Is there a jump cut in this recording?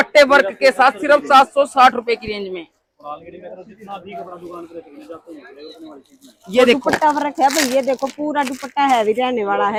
no; 0 cuts

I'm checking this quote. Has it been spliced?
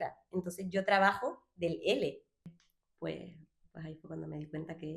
yes; 1 cut; at 2.5 s

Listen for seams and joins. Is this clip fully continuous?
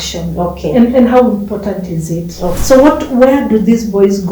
no; 1 cut; at 2.6 s

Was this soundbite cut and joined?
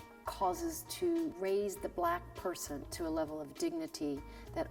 no; 0 cuts

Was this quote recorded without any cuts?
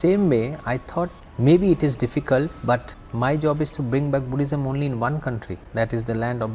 no; 3 cuts; at 1.2 s, 3.0 s, 5.5 s

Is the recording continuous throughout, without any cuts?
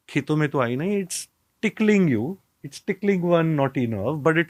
yes; 0 cuts

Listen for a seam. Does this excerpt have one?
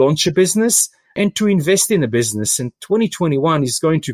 yes; 1 cut; at 1.1 s

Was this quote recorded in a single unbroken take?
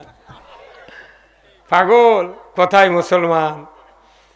yes; 0 cuts

